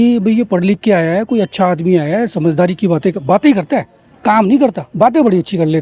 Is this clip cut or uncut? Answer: uncut